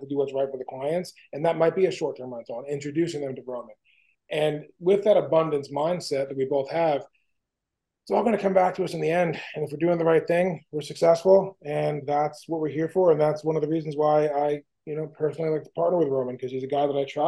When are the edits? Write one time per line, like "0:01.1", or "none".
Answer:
none